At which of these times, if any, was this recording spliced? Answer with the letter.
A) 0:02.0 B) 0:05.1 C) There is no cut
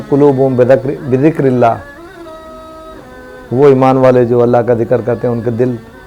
C